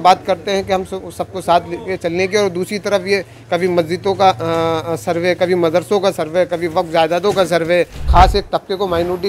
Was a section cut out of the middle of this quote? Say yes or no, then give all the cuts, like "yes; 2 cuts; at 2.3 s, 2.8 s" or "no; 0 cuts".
yes; 1 cut; at 8.1 s